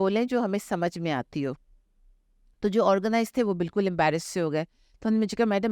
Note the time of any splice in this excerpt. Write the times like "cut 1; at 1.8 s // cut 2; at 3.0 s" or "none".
none